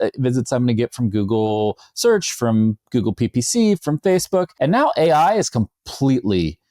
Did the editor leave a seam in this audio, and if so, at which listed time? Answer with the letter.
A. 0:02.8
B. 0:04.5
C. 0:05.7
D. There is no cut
B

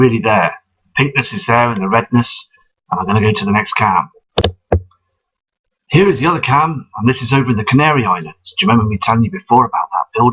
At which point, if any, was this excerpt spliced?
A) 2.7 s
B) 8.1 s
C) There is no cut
B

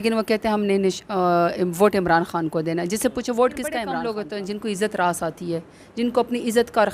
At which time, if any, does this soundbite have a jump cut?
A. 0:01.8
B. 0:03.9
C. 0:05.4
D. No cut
B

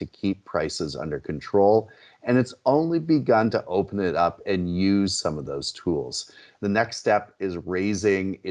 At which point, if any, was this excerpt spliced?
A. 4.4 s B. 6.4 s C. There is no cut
B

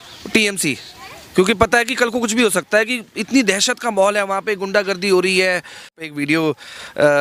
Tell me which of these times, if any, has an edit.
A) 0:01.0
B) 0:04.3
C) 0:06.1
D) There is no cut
C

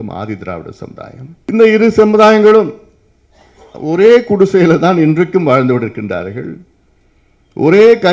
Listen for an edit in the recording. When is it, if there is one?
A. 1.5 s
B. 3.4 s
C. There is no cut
A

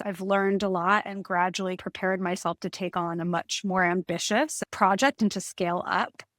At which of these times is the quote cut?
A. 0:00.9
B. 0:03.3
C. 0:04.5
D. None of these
C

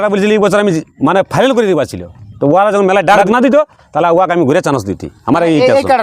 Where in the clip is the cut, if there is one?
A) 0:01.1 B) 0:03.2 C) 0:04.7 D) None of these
B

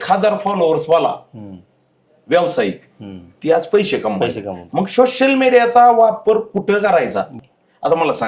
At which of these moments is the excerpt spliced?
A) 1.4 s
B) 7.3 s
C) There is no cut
B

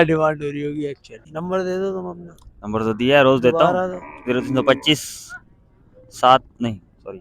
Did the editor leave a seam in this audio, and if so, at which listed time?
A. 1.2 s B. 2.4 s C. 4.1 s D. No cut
A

